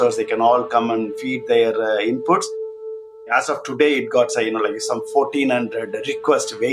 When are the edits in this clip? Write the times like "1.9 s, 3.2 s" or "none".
3.1 s